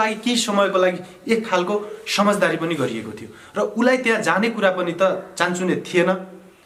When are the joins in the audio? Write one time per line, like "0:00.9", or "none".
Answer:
none